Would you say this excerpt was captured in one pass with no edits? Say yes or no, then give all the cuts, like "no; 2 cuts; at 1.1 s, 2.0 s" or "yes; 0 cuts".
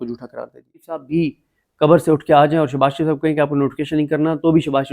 no; 1 cut; at 1.0 s